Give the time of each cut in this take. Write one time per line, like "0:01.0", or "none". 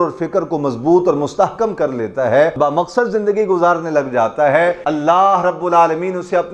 0:02.5
0:04.8